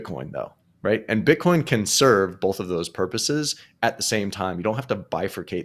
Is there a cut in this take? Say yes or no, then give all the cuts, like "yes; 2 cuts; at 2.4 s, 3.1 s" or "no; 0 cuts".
no; 0 cuts